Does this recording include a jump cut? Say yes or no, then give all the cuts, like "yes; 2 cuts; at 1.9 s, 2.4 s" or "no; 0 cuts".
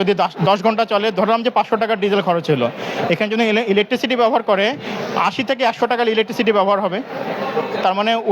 no; 0 cuts